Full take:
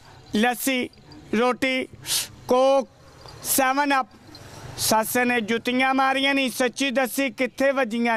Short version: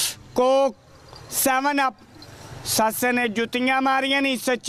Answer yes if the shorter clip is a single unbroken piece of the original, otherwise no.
yes